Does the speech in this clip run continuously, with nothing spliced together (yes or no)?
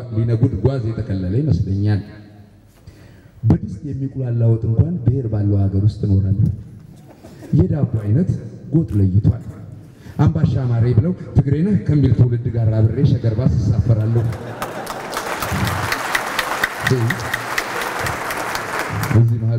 yes